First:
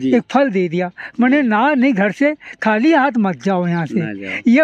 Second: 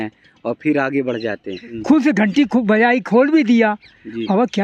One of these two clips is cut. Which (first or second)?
second